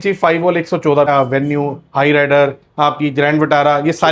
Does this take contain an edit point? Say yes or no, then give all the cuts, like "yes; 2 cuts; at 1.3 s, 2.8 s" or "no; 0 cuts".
yes; 1 cut; at 1.1 s